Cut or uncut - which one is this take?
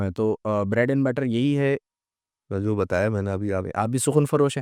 uncut